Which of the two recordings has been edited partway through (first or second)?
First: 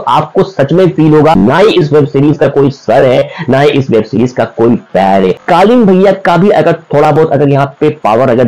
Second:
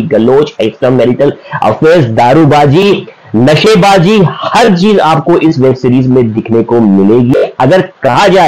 first